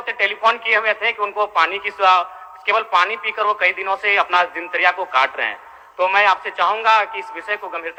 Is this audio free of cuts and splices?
yes; 0 cuts

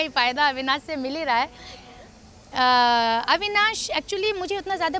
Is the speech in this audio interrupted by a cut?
no; 0 cuts

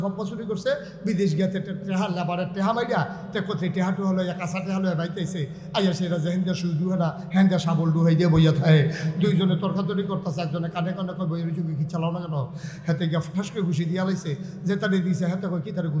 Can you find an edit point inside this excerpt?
no; 0 cuts

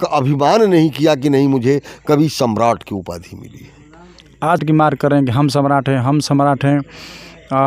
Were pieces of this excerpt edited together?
yes; 1 cut; at 4.6 s

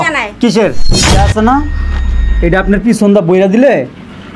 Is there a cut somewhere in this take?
yes; 1 cut; at 0.9 s

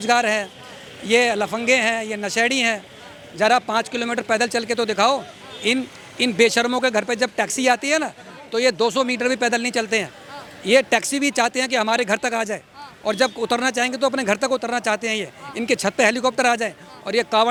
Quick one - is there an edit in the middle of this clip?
no; 0 cuts

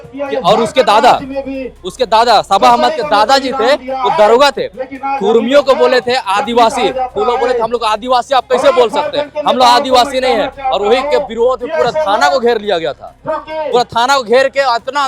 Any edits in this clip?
no; 0 cuts

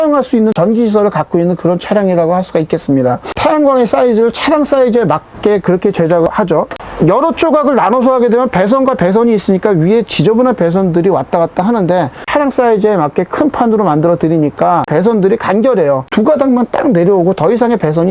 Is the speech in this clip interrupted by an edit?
yes; 3 cuts; at 12.3 s, 14.9 s, 16.1 s

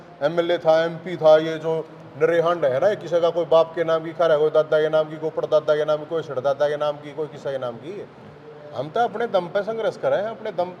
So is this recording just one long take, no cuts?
yes; 0 cuts

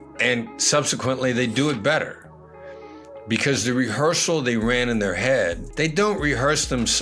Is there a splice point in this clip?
yes; 1 cut; at 5.6 s

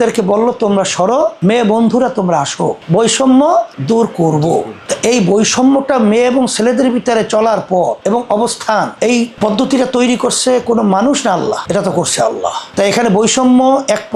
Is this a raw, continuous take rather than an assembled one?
yes; 0 cuts

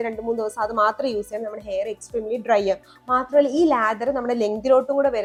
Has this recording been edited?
no; 0 cuts

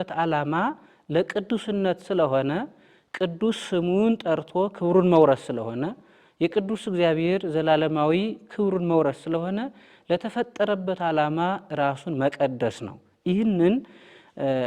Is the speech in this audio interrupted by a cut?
no; 0 cuts

